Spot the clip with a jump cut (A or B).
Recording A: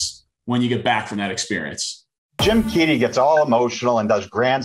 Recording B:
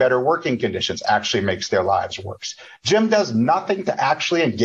A